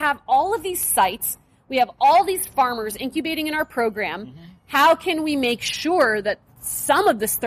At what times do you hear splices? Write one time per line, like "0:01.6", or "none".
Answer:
none